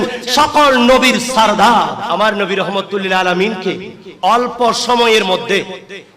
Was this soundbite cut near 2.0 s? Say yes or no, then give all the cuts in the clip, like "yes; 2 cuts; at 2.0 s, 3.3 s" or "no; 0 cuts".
yes; 1 cut; at 2.0 s